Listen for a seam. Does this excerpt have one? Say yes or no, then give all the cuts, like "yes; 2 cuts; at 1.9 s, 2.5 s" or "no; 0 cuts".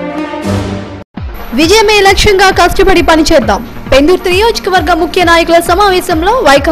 no; 0 cuts